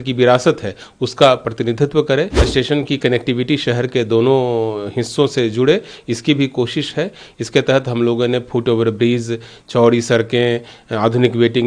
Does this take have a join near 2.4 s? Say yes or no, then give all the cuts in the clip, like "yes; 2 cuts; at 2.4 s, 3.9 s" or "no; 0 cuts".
yes; 1 cut; at 2.4 s